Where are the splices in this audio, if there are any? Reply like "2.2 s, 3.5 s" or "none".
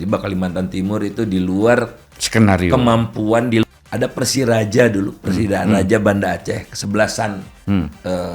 3.6 s